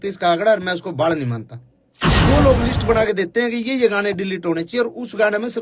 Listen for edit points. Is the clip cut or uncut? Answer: cut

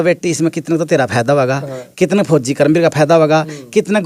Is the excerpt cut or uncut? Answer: uncut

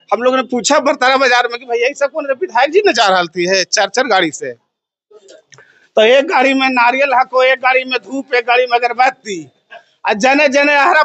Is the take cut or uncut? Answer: uncut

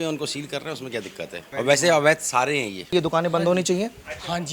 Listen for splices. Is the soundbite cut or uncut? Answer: cut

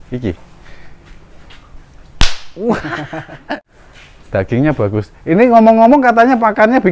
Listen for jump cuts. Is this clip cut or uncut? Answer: cut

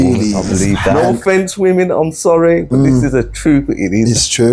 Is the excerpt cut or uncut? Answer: cut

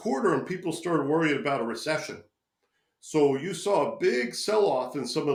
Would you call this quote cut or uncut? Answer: uncut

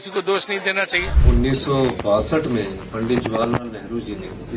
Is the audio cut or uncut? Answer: cut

